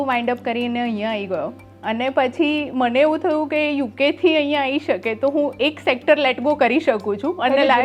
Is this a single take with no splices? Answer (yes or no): yes